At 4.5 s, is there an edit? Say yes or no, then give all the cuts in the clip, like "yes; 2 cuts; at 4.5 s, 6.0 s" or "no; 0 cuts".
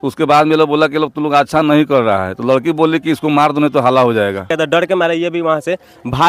yes; 1 cut; at 4.5 s